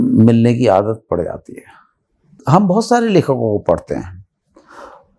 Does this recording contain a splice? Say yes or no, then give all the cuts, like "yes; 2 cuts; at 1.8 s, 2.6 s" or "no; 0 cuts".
yes; 1 cut; at 2.4 s